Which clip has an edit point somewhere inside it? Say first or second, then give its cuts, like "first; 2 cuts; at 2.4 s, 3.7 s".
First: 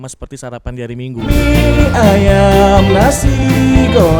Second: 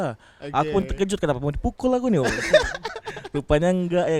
first; 1 cut; at 1.2 s